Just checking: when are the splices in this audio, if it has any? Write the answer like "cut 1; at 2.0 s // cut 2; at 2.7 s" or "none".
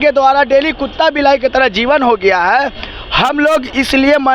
none

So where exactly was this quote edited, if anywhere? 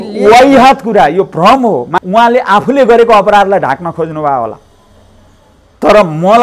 cut 1; at 1.9 s

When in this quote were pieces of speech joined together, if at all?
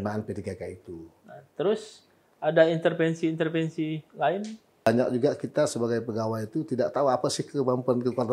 cut 1; at 4.9 s

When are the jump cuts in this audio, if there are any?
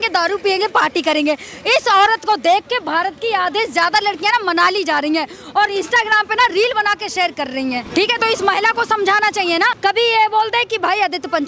cut 1; at 7.8 s // cut 2; at 9.7 s

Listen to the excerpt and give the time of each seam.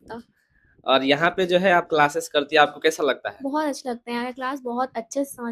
none

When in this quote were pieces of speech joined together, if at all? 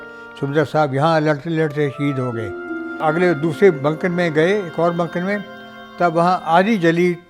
cut 1; at 3.0 s

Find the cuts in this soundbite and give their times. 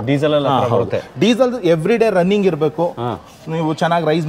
none

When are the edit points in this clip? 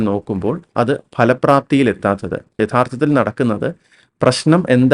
cut 1; at 2.6 s

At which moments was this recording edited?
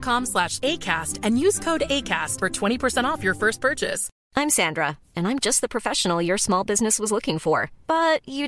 cut 1; at 4.2 s

